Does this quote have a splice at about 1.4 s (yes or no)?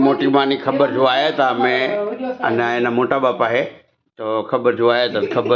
yes